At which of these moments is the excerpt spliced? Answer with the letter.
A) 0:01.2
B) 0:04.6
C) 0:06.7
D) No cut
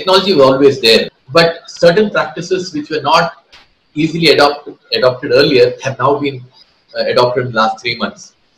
A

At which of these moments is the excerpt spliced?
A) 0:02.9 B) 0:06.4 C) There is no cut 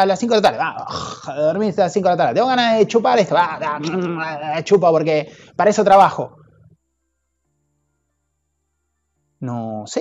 C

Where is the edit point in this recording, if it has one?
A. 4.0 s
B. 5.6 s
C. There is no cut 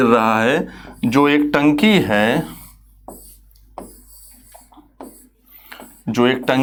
C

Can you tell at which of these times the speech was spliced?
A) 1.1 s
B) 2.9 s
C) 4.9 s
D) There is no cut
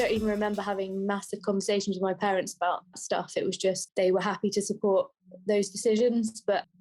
B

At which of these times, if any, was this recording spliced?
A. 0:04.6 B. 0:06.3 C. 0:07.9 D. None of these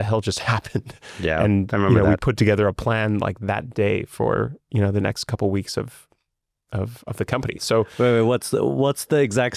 C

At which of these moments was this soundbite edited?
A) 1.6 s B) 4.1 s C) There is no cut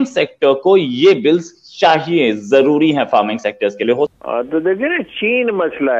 B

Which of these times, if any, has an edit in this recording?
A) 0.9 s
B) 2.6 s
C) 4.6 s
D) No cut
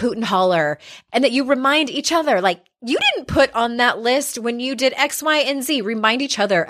A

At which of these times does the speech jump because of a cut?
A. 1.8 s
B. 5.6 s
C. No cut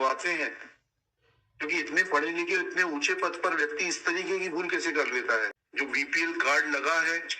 B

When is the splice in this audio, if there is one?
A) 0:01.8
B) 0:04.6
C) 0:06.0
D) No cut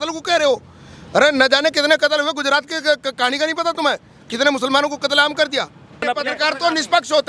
C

